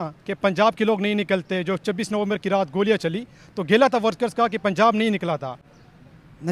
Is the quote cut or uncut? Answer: uncut